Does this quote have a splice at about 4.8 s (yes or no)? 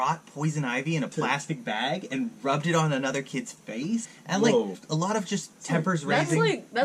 yes